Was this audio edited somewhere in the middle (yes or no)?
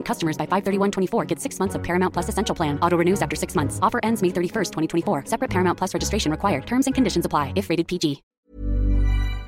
yes